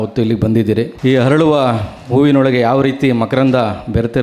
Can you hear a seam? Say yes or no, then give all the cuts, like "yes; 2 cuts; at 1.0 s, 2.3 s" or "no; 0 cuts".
yes; 1 cut; at 0.9 s